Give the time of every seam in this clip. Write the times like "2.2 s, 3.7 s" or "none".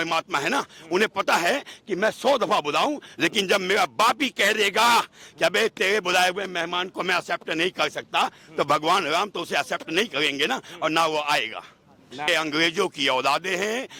12.3 s